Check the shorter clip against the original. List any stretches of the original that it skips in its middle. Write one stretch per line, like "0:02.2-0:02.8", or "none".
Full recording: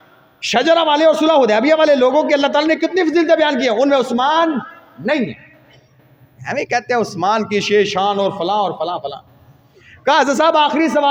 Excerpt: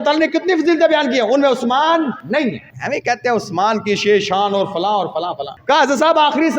0:04.8-0:06.0
0:09.1-0:09.9

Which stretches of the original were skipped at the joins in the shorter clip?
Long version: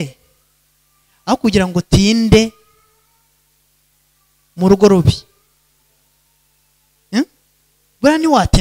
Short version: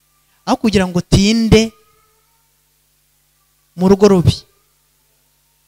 none

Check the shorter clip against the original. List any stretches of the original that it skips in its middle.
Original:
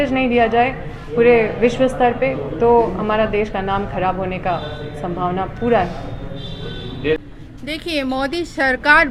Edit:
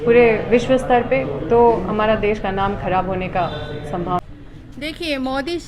0:05.4-0:07.1

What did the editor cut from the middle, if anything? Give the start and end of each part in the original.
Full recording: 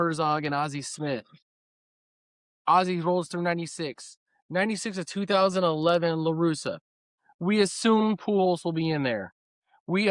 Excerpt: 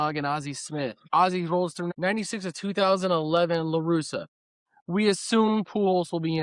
0:01.3-0:02.5
0:03.4-0:04.4

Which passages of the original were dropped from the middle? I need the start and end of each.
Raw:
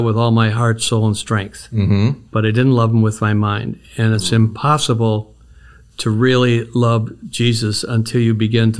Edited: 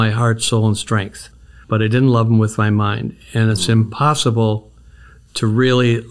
0:01.8-0:02.1

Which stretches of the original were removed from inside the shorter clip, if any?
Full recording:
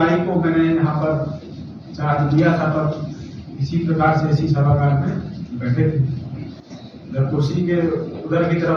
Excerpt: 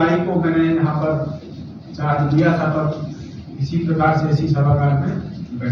none

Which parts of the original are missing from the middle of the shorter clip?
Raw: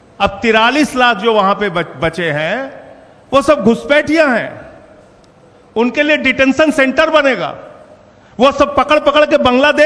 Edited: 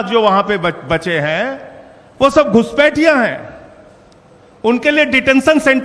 none

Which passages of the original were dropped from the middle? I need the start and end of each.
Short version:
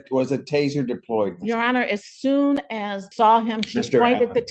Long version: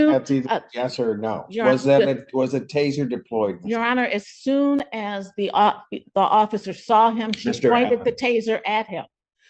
0:05.2-0:06.7

